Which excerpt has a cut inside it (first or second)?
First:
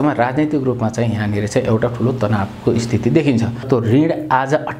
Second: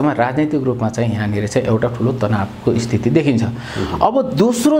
first